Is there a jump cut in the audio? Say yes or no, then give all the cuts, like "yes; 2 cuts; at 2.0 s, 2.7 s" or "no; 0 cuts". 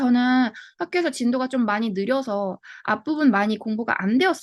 no; 0 cuts